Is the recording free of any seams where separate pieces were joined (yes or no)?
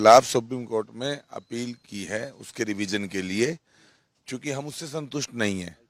yes